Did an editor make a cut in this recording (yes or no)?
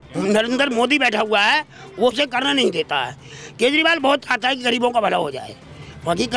no